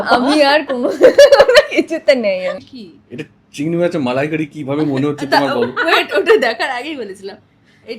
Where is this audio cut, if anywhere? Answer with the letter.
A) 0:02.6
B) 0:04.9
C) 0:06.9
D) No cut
A